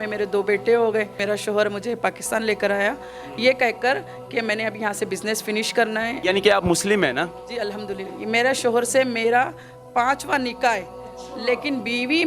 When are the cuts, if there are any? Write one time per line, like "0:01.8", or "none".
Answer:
0:01.1
0:06.2
0:08.1